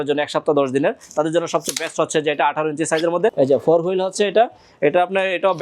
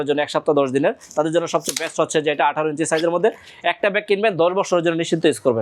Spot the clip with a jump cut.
first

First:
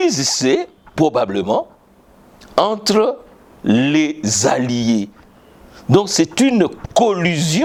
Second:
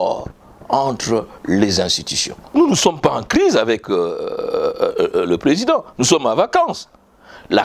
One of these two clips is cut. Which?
second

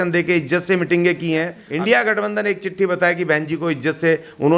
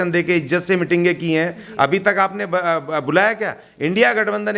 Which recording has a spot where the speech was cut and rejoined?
first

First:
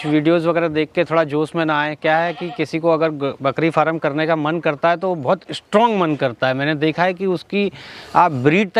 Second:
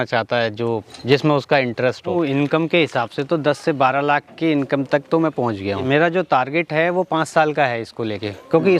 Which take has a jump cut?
second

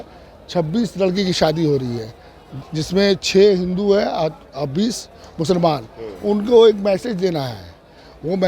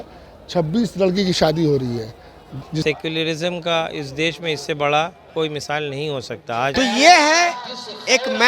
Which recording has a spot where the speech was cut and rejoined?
second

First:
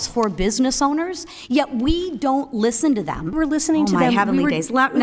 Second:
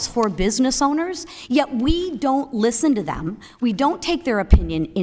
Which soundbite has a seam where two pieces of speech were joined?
first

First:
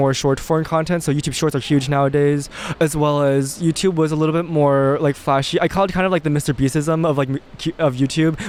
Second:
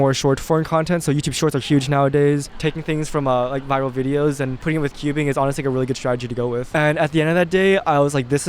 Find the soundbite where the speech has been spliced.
second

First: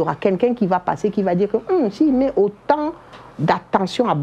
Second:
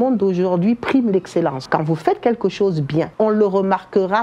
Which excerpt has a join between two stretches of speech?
second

